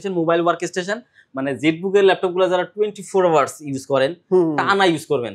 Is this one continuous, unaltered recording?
yes; 0 cuts

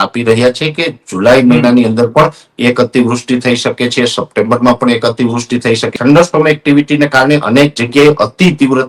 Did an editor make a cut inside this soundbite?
yes; 1 cut; at 6.0 s

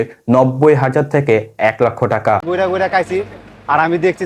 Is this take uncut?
no; 1 cut; at 2.4 s

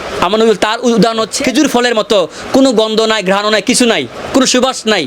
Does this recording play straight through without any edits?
no; 1 cut; at 1.4 s

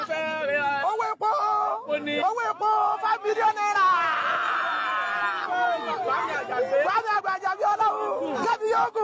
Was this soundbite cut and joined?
no; 0 cuts

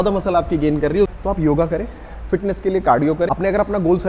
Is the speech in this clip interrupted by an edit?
yes; 2 cuts; at 1.1 s, 3.3 s

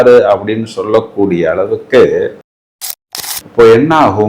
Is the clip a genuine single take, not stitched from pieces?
no; 1 cut; at 3.0 s

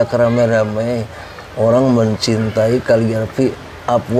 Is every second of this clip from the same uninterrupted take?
yes; 0 cuts

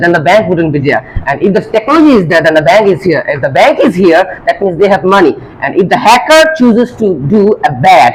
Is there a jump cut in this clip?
no; 0 cuts

